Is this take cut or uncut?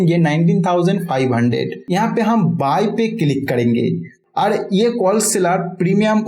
cut